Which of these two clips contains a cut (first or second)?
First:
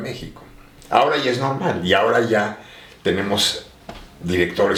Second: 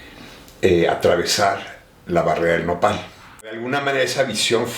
second